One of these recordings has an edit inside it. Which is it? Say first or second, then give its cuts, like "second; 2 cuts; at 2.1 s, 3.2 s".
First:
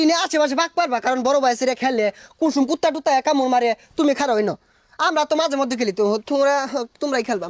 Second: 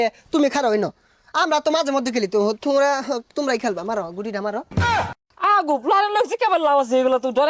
second; 1 cut; at 5.0 s